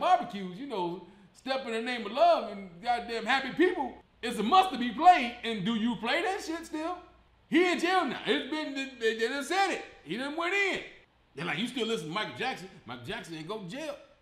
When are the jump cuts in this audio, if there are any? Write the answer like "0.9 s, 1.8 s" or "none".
none